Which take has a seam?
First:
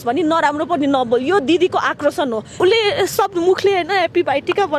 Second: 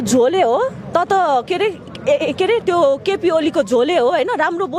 first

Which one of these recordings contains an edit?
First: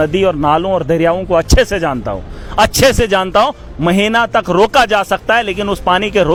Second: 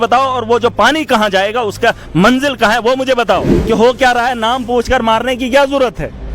second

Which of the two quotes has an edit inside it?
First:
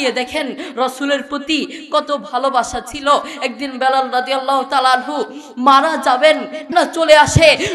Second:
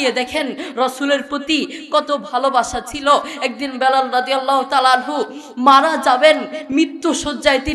first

